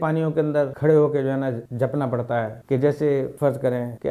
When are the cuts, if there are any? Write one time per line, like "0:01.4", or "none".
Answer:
0:01.7
0:03.3